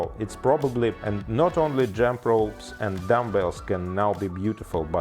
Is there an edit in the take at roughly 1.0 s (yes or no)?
yes